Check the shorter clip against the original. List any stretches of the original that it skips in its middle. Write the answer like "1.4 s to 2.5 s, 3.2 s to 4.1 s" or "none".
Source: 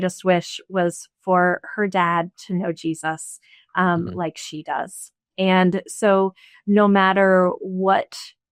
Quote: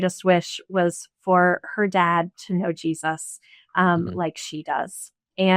none

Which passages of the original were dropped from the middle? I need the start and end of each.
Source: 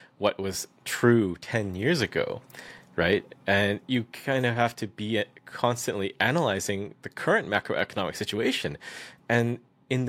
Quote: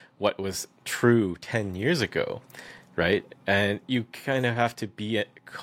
none

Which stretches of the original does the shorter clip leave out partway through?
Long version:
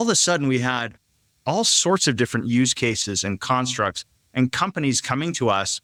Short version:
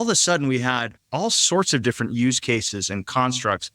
1.0 s to 1.3 s

